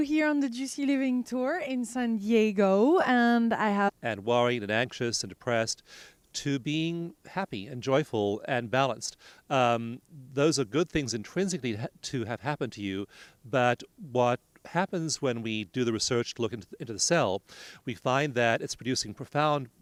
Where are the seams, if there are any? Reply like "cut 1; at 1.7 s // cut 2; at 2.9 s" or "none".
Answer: none